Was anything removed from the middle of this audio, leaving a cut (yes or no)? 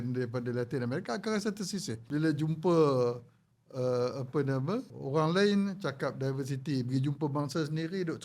yes